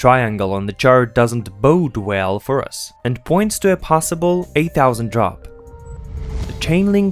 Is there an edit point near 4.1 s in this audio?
no; 1 cut; at 6.0 s

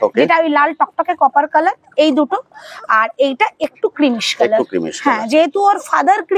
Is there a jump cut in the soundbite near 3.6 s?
no; 0 cuts

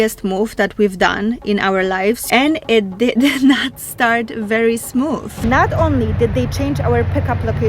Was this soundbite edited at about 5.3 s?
yes; 2 cuts; at 2.2 s, 5.3 s

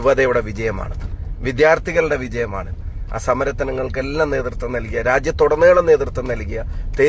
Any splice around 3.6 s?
no; 0 cuts

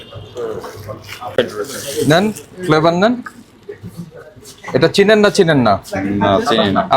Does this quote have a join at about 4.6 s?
no; 1 cut; at 1.4 s

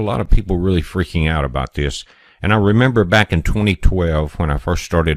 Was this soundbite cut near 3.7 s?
yes; 1 cut; at 3.7 s

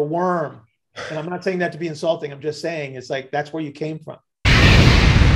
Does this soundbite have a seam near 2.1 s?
no; 1 cut; at 4.4 s

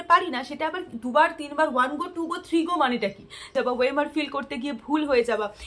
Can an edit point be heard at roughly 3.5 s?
yes; 1 cut; at 3.5 s

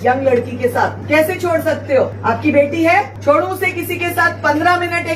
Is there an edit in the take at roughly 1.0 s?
yes; 3 cuts; at 1.0 s, 2.2 s, 3.1 s

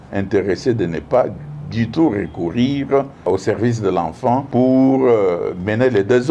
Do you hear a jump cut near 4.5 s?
yes; 2 cuts; at 3.2 s, 4.5 s

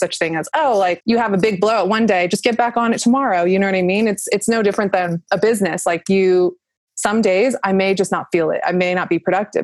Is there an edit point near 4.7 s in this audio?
no; 1 cut; at 1.0 s

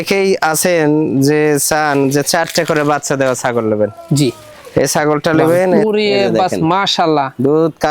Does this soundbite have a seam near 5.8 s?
yes; 1 cut; at 5.8 s

